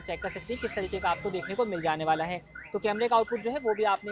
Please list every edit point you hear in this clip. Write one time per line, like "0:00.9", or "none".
none